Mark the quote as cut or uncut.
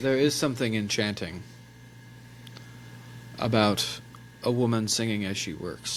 uncut